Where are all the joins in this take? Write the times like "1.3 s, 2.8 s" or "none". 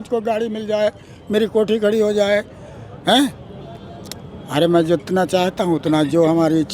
none